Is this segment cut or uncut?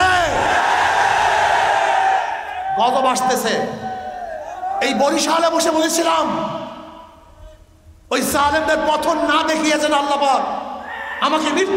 uncut